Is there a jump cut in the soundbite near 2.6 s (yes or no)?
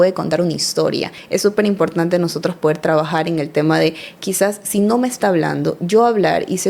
no